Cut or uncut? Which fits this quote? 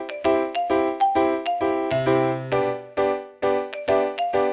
uncut